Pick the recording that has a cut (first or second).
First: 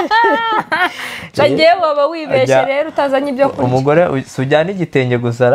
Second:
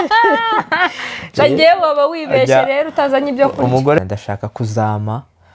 second